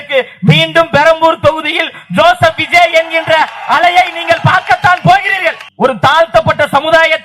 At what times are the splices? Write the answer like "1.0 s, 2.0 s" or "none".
5.6 s